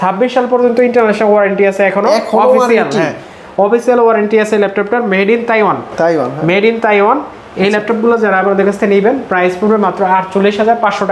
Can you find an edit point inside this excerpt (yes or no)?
no